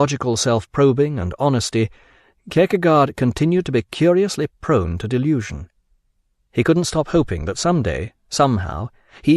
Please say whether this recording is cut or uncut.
cut